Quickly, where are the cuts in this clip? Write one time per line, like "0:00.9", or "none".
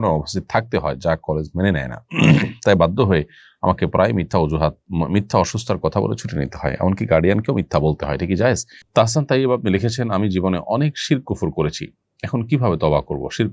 0:08.7